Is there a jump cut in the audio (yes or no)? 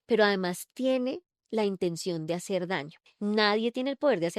yes